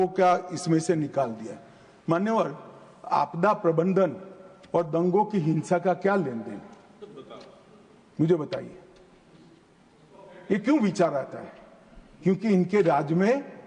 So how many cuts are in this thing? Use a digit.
0